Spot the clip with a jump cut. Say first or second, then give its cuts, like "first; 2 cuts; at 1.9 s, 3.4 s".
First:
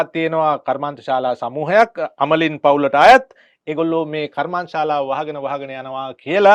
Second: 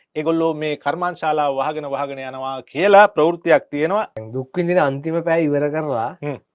second; 1 cut; at 4.2 s